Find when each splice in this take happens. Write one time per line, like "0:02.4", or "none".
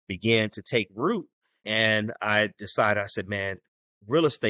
0:01.6